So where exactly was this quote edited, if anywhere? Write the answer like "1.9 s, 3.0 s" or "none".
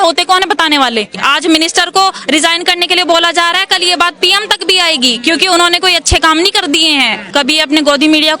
1.2 s, 7.3 s